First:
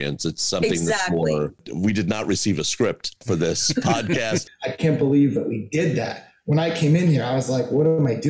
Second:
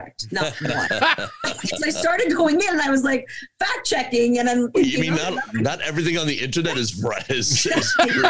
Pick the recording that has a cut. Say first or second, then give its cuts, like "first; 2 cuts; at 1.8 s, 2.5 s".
first; 2 cuts; at 1.7 s, 4.6 s